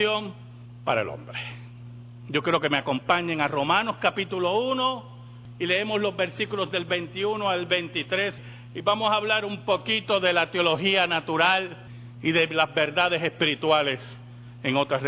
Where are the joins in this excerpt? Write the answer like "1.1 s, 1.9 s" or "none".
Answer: 2.4 s

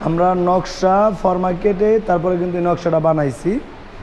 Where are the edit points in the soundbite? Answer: none

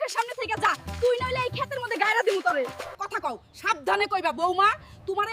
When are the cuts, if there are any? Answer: 2.8 s

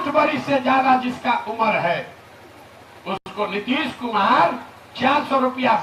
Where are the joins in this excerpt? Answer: none

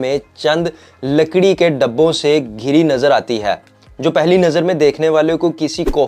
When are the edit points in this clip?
none

